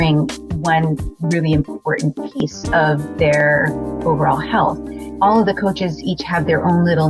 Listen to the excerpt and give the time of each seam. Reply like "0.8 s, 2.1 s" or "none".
5.0 s